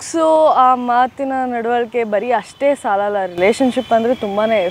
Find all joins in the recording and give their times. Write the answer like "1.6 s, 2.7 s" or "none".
none